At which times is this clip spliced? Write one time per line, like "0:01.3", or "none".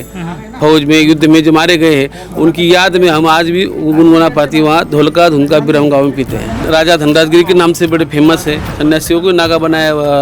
0:06.7
0:08.7